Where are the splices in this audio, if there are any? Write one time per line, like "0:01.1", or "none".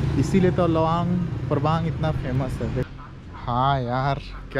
0:02.9